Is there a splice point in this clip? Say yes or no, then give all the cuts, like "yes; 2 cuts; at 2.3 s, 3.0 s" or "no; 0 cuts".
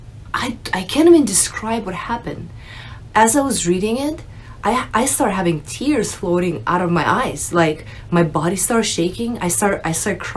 no; 0 cuts